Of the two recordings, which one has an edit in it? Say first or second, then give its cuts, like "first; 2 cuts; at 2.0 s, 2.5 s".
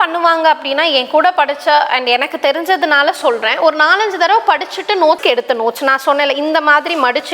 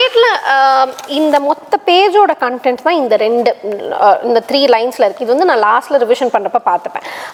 first; 1 cut; at 5.2 s